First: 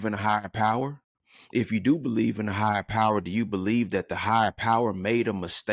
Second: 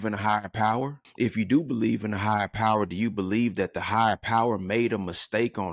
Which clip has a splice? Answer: second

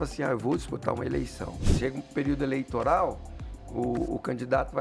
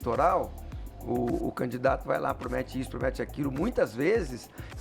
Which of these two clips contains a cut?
first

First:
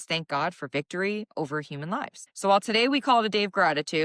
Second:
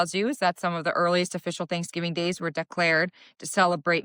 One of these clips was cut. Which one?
first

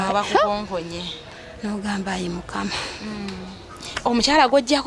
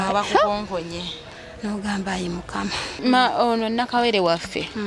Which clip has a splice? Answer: second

